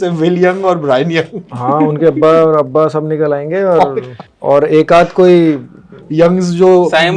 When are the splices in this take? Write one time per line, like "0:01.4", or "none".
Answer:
none